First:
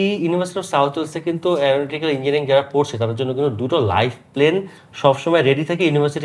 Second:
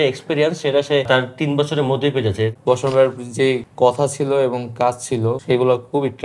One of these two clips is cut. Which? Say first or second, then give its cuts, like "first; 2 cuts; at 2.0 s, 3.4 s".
second; 4 cuts; at 1.1 s, 2.6 s, 3.7 s, 5.4 s